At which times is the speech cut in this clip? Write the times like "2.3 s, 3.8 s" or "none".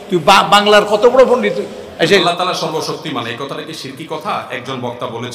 2.2 s